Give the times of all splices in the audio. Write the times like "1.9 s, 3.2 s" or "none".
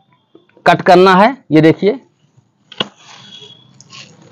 none